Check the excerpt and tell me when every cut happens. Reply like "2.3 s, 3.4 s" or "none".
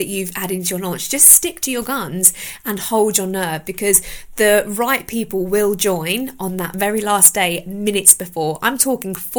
none